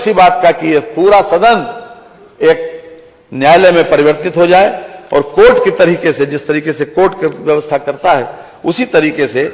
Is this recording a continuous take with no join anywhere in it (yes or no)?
yes